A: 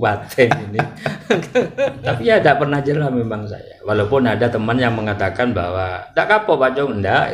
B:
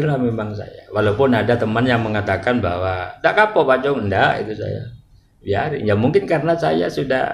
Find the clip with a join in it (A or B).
A